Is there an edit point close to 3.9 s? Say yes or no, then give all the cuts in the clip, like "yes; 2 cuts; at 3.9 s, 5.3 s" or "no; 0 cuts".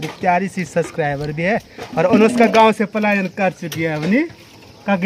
no; 0 cuts